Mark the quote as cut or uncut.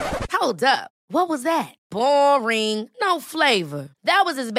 uncut